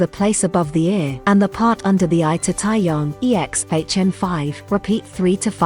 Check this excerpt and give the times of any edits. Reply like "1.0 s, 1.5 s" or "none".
1.1 s, 3.1 s, 4.5 s